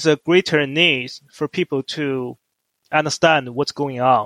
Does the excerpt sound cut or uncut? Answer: uncut